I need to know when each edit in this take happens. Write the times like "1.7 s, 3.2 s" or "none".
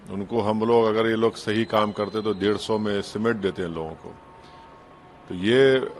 none